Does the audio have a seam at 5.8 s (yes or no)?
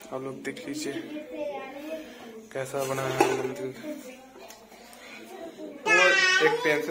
yes